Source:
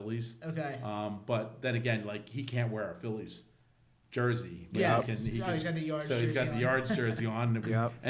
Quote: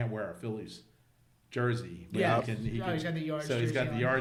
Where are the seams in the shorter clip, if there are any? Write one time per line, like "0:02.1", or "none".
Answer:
none